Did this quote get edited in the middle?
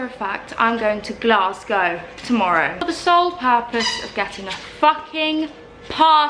yes; 1 cut; at 2.8 s

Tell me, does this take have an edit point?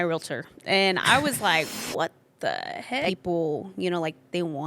yes; 1 cut; at 3.1 s

